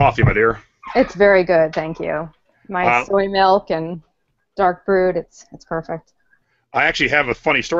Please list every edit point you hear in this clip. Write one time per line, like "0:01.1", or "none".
none